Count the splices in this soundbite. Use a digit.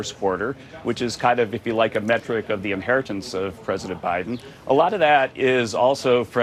0